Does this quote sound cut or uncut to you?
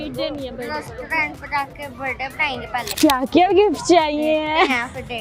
cut